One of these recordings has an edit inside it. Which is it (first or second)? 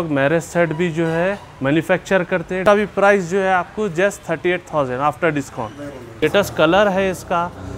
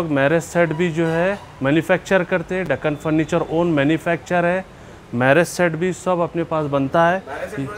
first